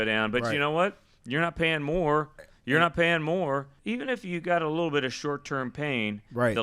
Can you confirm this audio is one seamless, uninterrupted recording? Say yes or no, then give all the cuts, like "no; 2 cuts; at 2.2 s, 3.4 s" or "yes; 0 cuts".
no; 1 cut; at 3.8 s